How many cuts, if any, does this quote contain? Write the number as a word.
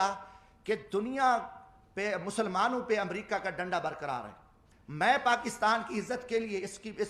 one